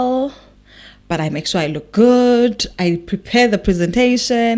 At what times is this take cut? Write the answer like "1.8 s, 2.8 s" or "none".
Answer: none